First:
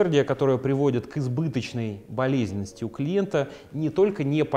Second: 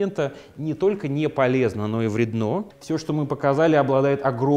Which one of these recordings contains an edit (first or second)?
second